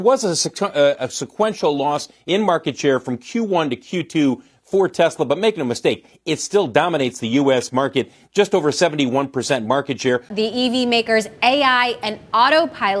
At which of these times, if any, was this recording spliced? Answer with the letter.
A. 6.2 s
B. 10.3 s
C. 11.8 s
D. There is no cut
B